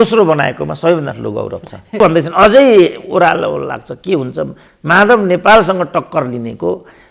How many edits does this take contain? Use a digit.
1